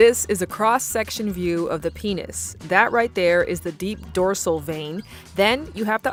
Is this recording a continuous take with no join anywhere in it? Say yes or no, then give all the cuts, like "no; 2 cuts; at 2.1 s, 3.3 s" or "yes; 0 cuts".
yes; 0 cuts